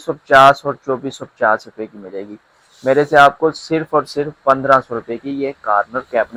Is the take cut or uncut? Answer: uncut